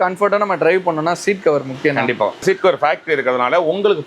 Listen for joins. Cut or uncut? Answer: cut